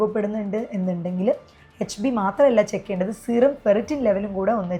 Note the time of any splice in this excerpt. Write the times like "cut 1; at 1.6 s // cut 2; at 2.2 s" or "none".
none